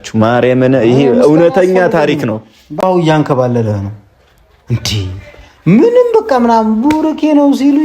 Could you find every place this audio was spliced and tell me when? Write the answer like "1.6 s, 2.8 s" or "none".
2.8 s